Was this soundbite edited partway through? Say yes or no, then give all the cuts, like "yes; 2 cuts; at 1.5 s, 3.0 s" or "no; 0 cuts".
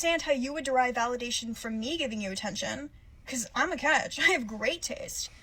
no; 0 cuts